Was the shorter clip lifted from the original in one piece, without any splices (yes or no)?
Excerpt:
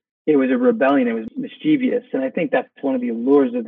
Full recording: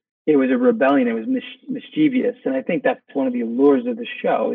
no